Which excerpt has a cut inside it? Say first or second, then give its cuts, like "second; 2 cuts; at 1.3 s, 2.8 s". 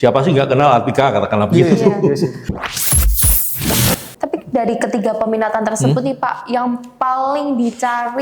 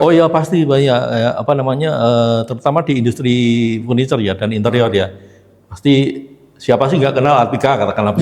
first; 1 cut; at 2.5 s